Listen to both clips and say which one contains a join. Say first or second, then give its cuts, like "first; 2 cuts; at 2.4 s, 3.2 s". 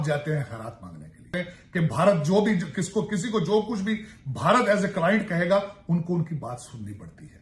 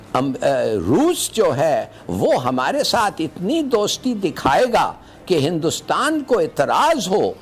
first; 1 cut; at 1.3 s